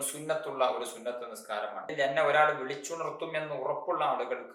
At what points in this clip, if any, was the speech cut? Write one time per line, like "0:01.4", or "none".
0:01.9